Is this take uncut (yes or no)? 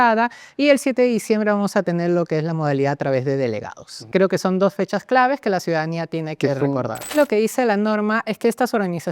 no